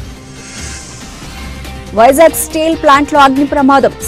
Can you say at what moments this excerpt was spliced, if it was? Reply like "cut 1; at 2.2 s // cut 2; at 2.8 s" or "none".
none